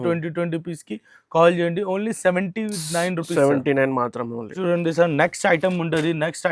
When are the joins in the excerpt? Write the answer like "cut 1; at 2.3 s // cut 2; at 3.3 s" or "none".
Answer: none